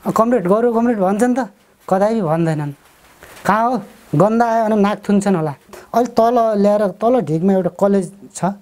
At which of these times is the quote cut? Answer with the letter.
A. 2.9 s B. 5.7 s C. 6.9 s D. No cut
B